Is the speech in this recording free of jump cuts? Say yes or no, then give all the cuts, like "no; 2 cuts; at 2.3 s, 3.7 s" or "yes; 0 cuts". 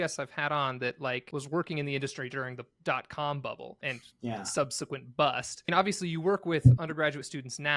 no; 3 cuts; at 1.2 s, 3.8 s, 5.7 s